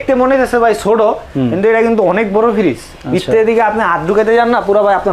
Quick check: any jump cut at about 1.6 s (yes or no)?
no